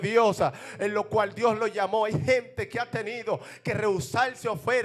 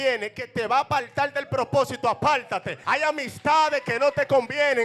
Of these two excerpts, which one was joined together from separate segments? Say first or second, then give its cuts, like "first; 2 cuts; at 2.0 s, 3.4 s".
second; 1 cut; at 2.7 s